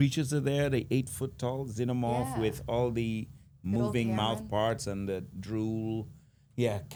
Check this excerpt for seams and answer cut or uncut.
uncut